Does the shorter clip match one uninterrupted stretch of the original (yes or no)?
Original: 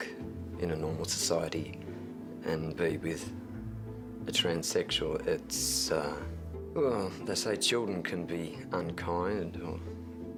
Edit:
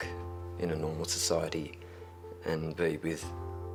yes